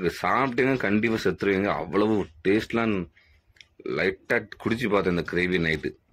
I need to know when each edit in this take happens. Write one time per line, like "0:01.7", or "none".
none